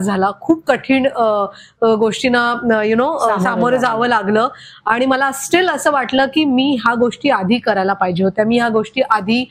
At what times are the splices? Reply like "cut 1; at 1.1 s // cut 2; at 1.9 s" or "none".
none